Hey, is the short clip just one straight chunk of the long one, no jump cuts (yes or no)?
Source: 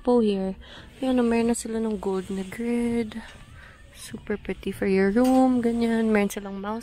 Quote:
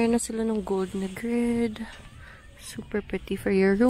yes